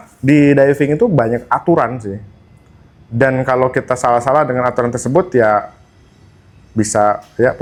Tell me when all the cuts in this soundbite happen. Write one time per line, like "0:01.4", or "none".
none